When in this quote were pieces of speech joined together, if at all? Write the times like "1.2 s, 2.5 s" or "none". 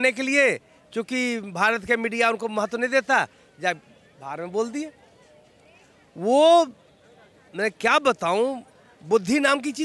none